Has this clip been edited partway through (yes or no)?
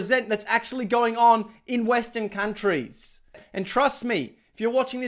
yes